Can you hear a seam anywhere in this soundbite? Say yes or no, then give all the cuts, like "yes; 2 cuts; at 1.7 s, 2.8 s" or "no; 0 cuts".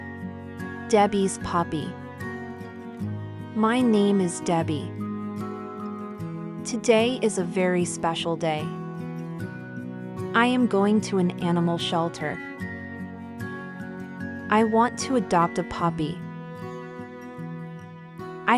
no; 0 cuts